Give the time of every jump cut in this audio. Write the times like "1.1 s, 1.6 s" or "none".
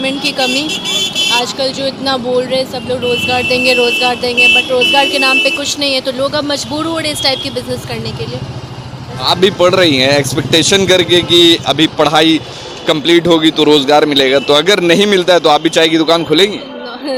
none